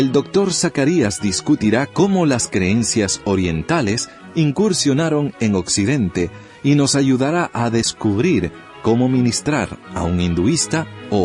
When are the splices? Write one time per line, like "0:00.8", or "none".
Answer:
0:03.5